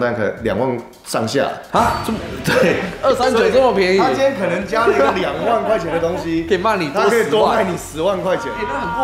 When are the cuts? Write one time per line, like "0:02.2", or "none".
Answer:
none